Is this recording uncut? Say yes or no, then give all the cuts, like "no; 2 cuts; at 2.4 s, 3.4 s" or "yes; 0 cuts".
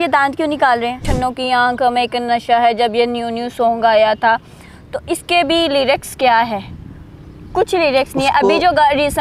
no; 1 cut; at 1.1 s